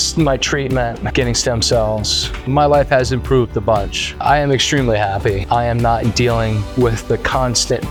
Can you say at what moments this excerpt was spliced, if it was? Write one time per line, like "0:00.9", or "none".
none